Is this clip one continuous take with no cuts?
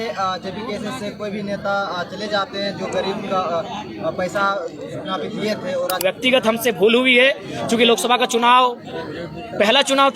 no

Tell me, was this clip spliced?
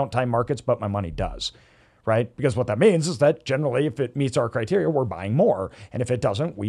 no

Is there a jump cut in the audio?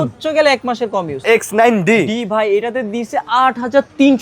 yes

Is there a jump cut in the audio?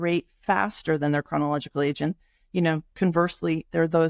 no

